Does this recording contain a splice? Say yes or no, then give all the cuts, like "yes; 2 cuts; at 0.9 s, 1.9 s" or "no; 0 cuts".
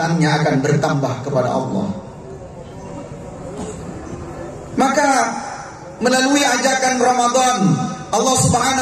no; 0 cuts